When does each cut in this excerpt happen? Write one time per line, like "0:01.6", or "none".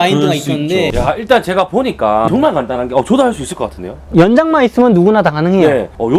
0:00.9
0:02.3
0:04.0